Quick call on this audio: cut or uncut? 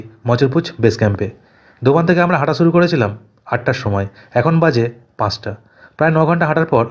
uncut